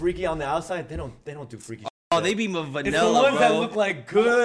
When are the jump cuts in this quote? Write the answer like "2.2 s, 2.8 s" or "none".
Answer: 2.9 s